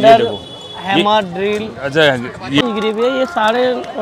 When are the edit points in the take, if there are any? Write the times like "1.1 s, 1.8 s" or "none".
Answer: 2.6 s